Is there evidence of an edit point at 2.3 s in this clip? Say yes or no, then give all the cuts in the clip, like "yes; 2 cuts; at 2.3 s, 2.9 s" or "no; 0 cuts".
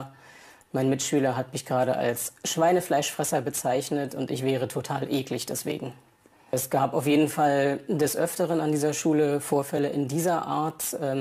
yes; 1 cut; at 2.3 s